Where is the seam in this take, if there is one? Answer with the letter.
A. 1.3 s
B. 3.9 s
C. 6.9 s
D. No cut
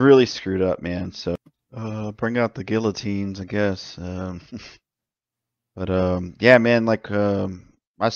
A